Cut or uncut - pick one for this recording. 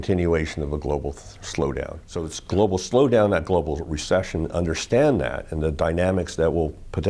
cut